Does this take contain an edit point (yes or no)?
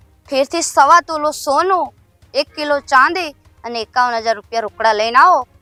no